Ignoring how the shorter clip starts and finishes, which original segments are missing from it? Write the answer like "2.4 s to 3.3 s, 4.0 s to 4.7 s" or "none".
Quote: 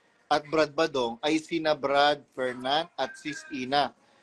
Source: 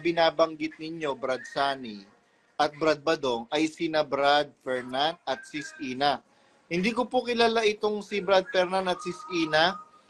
none